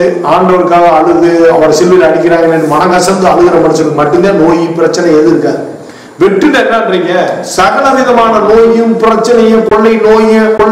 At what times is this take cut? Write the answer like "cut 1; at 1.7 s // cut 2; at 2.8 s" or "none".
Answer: cut 1; at 9.7 s